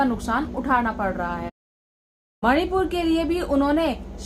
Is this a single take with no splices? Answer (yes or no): no